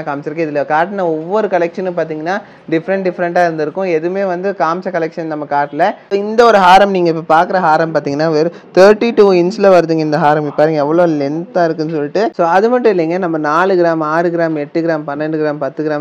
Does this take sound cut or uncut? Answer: cut